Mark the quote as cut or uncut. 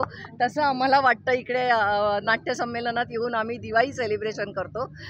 uncut